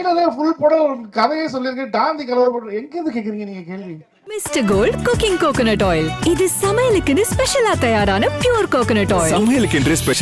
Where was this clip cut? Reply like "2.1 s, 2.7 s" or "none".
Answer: 4.1 s